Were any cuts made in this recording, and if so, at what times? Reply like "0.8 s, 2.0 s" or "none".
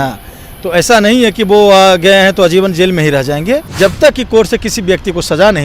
3.7 s